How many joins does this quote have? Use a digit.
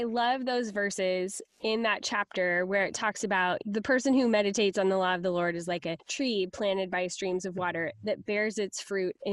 2